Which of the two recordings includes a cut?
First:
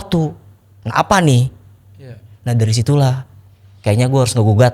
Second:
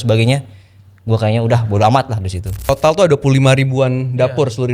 second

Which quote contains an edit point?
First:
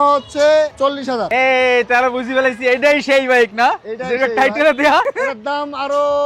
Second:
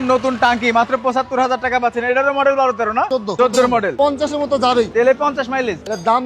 second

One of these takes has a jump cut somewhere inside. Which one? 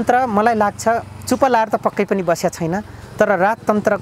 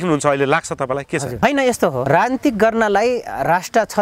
second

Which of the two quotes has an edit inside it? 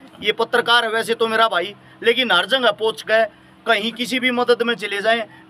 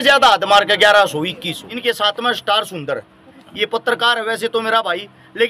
second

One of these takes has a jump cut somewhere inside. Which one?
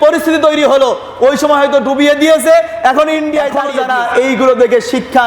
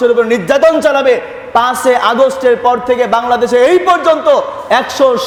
first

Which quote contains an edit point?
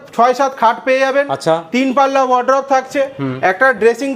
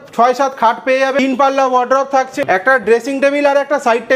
second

